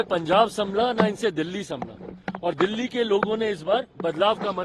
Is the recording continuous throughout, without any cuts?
yes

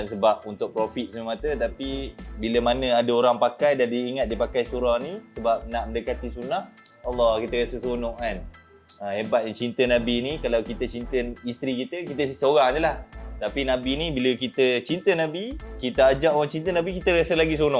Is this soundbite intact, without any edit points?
yes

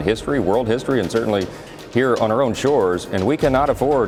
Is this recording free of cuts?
yes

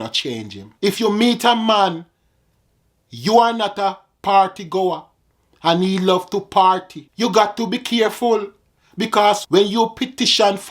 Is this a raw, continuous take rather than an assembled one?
no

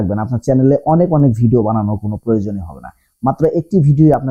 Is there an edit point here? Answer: no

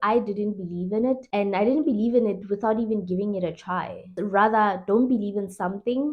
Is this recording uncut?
yes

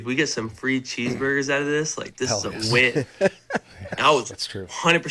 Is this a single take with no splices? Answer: yes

